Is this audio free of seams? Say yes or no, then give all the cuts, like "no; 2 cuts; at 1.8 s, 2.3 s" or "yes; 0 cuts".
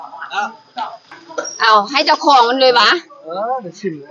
yes; 0 cuts